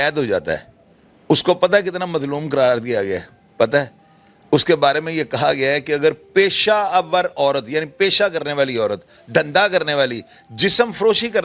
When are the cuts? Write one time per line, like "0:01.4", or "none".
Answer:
none